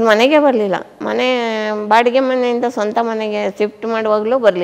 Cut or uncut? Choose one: cut